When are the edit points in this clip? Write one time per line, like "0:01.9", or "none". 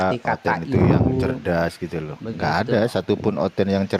none

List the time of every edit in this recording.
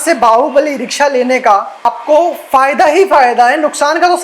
0:01.8

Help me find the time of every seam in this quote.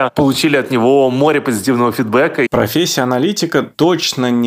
0:02.5

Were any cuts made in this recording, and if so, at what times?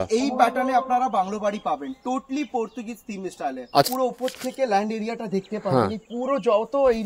0:03.9

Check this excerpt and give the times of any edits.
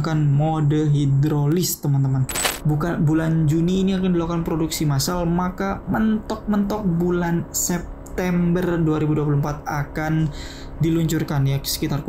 0:02.4

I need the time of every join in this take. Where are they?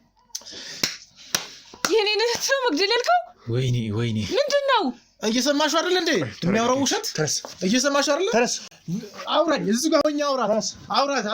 none

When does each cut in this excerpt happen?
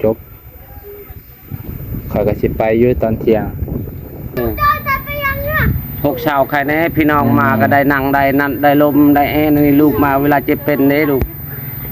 0:04.4

